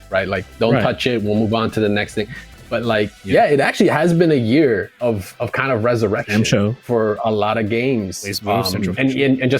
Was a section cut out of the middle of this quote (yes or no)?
yes